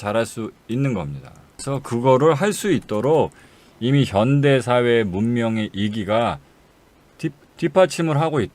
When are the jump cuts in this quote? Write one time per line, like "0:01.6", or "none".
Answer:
0:01.6